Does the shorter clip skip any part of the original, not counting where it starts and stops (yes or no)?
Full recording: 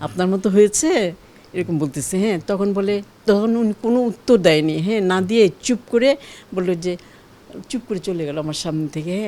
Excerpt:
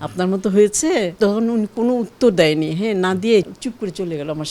yes